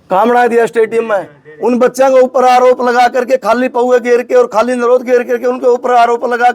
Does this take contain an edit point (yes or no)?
no